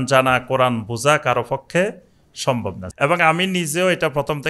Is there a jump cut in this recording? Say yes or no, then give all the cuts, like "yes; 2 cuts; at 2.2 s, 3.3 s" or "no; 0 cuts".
yes; 1 cut; at 2.8 s